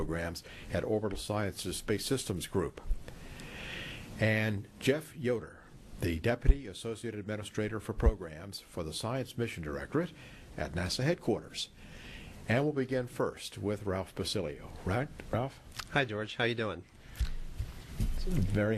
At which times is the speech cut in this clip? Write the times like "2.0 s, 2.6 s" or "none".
16.8 s